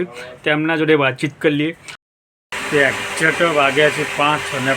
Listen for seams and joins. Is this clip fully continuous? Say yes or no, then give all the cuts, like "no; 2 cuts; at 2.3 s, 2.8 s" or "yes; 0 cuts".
no; 1 cut; at 2.0 s